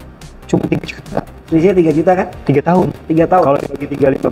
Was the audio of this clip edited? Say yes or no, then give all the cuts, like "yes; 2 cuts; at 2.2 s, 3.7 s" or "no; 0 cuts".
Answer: no; 0 cuts